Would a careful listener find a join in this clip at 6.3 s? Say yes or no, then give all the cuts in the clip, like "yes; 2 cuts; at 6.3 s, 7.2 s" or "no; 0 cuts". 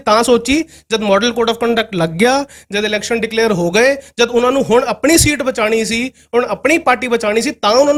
no; 0 cuts